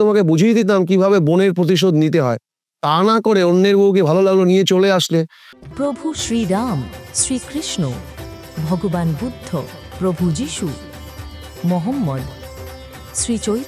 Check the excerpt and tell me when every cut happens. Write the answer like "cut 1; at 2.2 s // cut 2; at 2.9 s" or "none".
cut 1; at 5.5 s